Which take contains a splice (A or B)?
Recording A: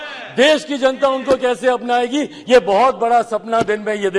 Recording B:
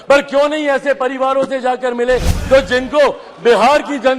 B